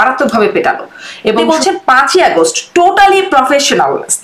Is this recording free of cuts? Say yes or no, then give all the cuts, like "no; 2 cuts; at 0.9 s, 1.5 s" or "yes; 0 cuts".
no; 1 cut; at 1.4 s